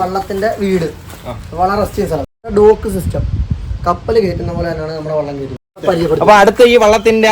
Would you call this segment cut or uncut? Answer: cut